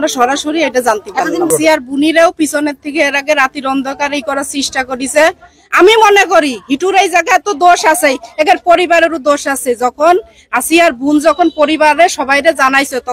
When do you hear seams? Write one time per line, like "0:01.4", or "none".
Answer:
0:01.5